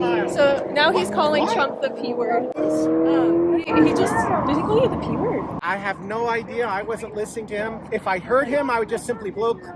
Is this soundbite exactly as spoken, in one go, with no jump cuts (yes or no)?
yes